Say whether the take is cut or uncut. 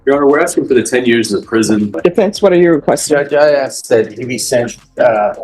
cut